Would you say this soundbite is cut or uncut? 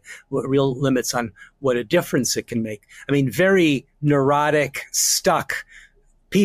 uncut